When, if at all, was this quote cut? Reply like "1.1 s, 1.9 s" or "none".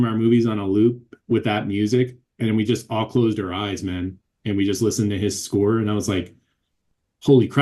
none